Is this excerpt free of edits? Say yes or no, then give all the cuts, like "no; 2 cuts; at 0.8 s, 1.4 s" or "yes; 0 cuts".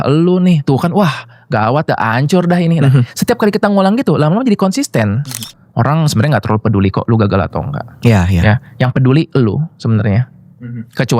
no; 1 cut; at 5.5 s